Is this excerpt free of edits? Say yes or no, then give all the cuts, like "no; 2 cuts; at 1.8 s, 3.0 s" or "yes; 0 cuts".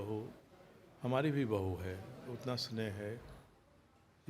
yes; 0 cuts